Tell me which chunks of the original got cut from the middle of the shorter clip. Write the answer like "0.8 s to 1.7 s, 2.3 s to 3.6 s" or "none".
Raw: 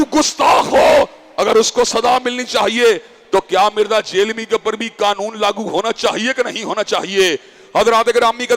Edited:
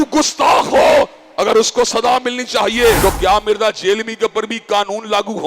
3.0 s to 3.3 s